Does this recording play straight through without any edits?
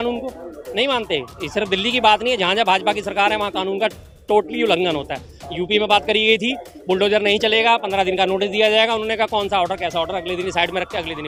yes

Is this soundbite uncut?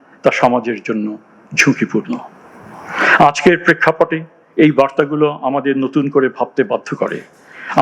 yes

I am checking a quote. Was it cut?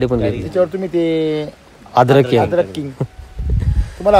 no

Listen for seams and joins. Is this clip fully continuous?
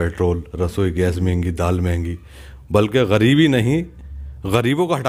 yes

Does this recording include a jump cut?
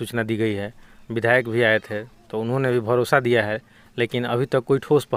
no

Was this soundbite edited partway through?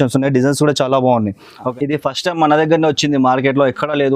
yes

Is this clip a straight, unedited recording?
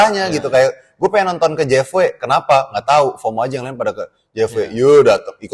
yes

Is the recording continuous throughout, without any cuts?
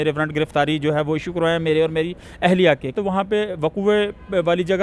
no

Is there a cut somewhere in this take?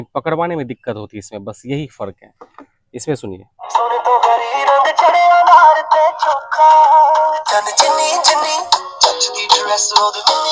yes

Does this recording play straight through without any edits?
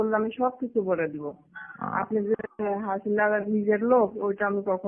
yes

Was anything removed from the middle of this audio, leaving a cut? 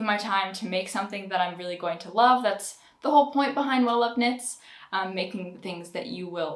no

